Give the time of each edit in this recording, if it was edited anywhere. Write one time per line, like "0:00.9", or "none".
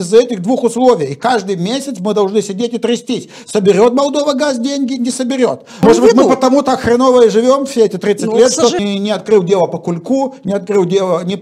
0:05.8
0:08.8